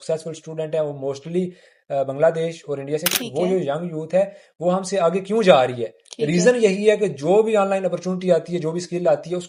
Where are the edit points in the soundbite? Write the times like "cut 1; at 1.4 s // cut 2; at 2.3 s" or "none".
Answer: cut 1; at 3.2 s